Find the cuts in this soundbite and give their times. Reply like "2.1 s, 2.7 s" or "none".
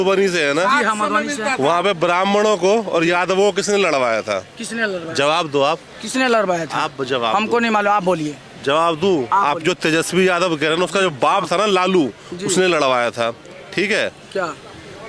none